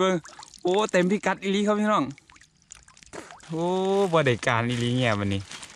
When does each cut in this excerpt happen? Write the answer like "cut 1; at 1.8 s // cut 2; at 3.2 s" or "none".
cut 1; at 3.4 s

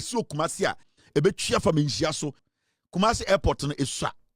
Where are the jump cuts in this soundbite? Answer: cut 1; at 0.8 s // cut 2; at 2.4 s

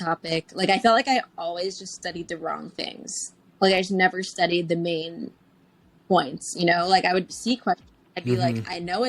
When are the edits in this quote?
none

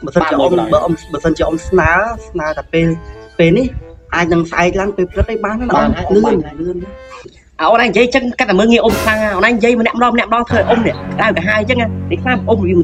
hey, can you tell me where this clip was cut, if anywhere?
none

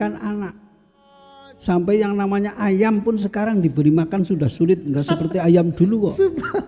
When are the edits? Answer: none

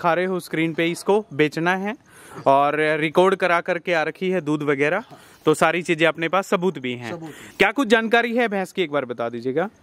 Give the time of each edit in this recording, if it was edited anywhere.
cut 1; at 7.5 s

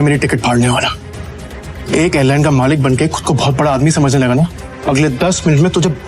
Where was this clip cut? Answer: cut 1; at 4.7 s

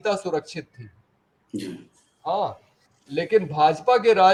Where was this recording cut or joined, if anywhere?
none

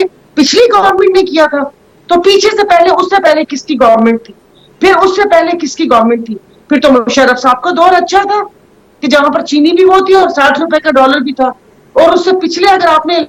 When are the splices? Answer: none

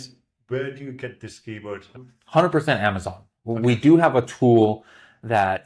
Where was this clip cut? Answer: cut 1; at 2.0 s

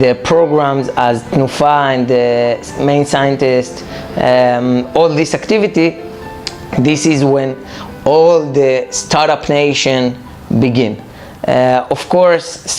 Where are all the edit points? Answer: none

